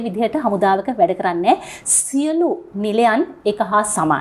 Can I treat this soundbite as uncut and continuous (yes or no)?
yes